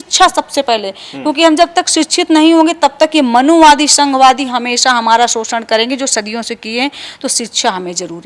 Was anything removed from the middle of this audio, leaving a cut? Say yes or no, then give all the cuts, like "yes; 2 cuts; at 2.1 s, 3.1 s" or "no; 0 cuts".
no; 0 cuts